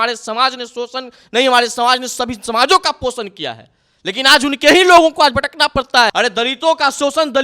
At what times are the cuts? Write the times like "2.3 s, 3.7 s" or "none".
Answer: 6.1 s